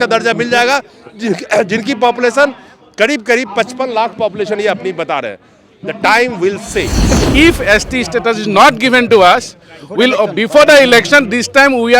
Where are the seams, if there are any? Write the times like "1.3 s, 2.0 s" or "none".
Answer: 7.2 s